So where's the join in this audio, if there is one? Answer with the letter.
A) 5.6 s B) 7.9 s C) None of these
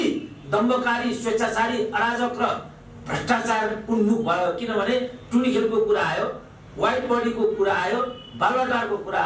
C